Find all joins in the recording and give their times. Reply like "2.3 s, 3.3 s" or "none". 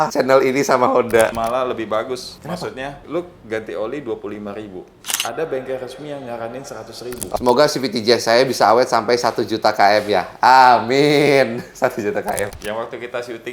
1.4 s, 7.3 s, 12.5 s